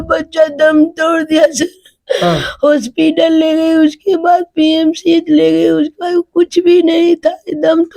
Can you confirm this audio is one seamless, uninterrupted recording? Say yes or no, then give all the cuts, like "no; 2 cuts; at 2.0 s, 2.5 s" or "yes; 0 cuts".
yes; 0 cuts